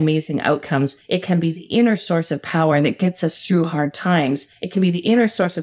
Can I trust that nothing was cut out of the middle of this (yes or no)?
no